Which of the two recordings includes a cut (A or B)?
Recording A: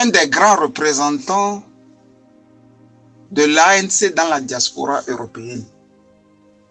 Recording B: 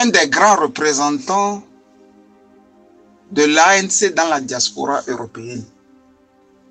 B